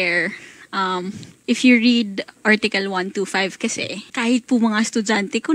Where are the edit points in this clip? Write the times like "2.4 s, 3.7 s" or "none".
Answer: 1.3 s, 4.0 s

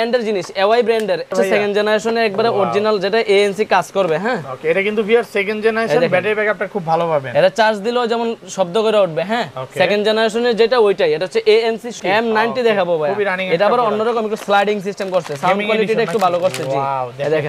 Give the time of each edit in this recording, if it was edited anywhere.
1.3 s, 11.9 s

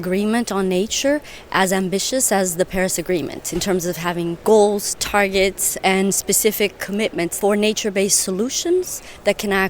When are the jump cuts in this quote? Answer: 4.4 s, 7.3 s

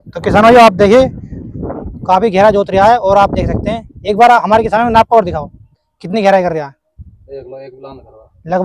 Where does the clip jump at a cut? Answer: none

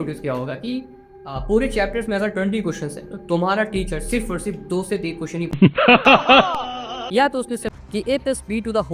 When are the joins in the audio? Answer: 5.7 s, 7.4 s

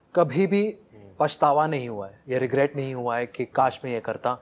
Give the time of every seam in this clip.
none

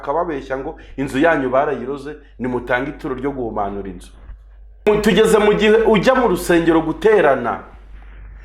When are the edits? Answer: 4.9 s

